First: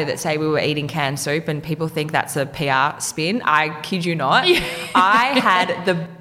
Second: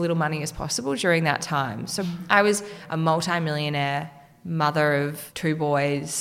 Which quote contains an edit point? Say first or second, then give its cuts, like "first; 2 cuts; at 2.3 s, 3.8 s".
second; 3 cuts; at 2.0 s, 2.8 s, 5.2 s